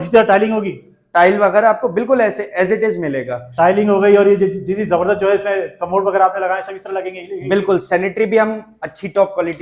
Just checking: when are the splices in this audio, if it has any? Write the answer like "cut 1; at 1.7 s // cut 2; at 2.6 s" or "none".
none